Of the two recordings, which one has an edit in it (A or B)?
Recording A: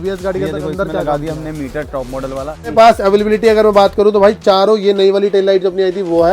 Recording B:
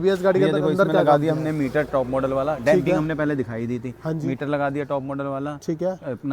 A